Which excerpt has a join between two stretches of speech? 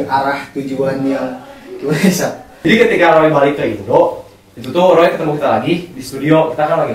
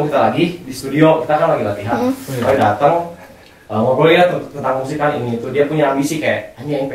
first; 1 cut; at 2.6 s

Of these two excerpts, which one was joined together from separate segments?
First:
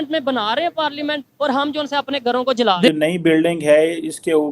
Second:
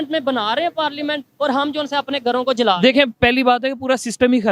first; 1 cut; at 2.9 s

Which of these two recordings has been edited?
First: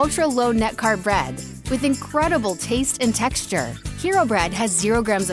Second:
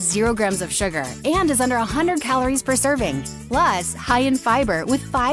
second; 1 cut; at 3.3 s

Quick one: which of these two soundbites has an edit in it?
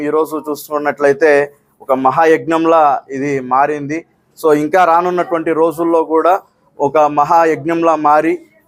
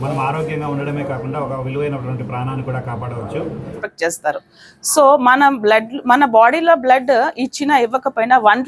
second; 1 cut; at 3.8 s

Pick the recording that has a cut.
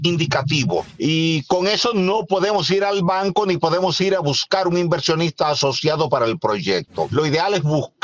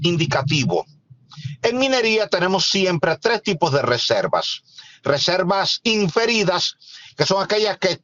first; 2 cuts; at 0.9 s, 7.1 s

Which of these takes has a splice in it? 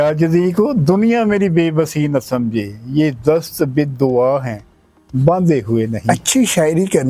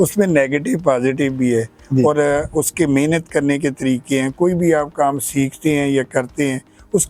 first; 1 cut; at 6.0 s

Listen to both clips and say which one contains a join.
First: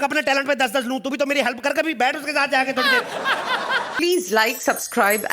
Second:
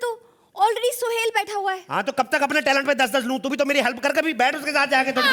first; 1 cut; at 3.9 s

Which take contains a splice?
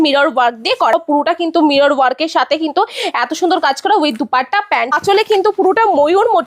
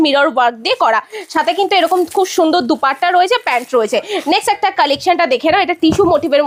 first; 2 cuts; at 0.9 s, 4.9 s

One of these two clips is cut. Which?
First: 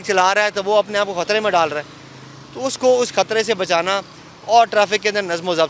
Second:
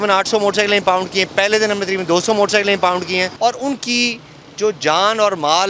second; 1 cut; at 3.3 s

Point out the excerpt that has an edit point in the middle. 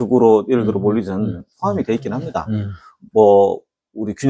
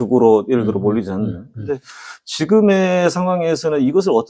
first; 1 cut; at 1.5 s

